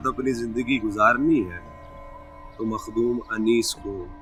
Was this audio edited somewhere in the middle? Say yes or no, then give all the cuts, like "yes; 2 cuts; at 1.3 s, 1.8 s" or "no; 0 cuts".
no; 0 cuts